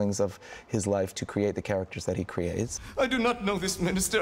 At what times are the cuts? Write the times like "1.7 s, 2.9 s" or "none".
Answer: 2.8 s